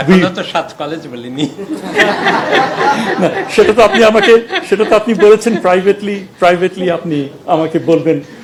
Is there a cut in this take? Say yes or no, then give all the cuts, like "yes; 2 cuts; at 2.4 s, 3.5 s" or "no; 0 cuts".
no; 0 cuts